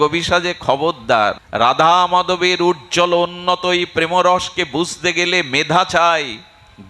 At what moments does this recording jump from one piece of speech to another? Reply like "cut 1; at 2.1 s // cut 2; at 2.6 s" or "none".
cut 1; at 1.4 s